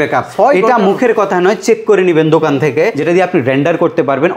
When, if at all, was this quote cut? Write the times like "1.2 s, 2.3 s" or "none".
3.0 s